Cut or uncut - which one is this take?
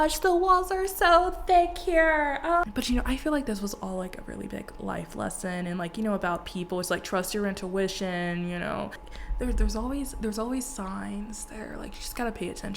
cut